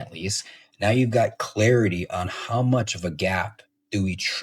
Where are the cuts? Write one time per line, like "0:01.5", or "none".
none